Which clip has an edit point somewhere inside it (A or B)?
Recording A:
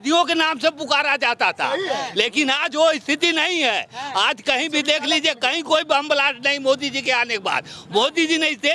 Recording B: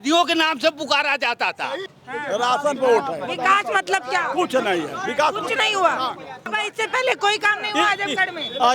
B